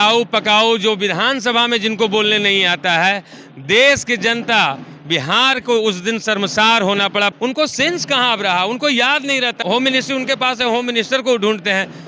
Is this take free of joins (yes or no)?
no